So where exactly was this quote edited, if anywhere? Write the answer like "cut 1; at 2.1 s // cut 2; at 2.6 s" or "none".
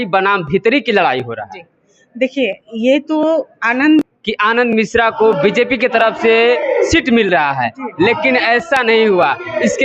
cut 1; at 4.0 s